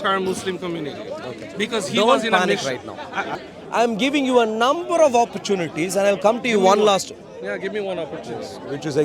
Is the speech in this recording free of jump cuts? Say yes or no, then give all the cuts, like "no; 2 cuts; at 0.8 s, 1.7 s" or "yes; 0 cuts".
no; 1 cut; at 3.3 s